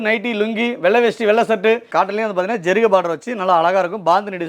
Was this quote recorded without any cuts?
no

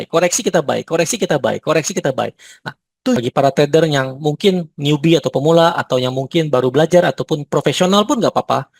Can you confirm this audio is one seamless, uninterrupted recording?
no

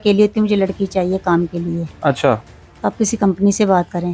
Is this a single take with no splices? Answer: yes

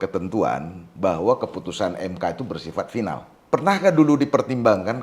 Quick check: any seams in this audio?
yes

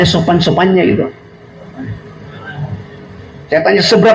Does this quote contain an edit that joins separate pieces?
no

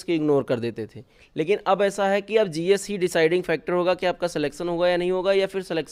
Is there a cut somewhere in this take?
no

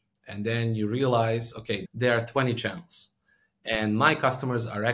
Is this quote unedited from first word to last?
no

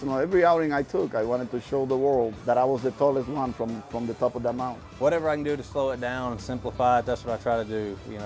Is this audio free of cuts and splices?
no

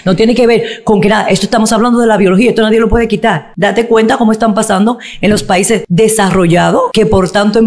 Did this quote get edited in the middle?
yes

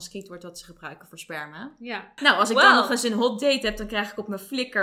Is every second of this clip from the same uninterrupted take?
no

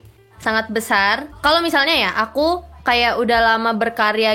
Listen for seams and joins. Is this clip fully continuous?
no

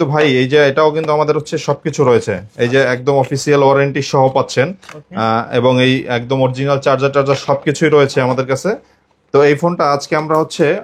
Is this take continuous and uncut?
yes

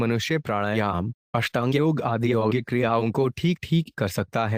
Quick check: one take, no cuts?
yes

